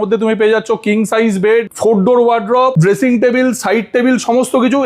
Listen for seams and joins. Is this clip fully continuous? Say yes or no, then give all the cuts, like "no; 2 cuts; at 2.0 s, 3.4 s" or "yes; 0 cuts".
no; 2 cuts; at 1.7 s, 2.7 s